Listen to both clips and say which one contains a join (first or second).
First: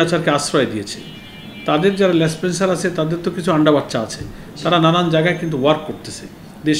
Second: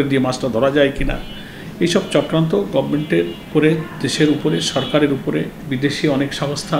second